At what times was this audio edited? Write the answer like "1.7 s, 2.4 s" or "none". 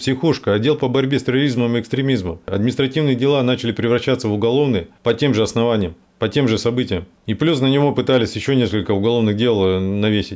2.5 s